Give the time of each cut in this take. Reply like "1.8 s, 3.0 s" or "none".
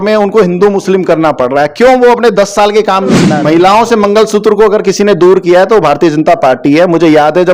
3.3 s